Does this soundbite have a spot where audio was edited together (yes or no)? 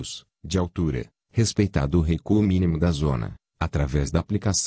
yes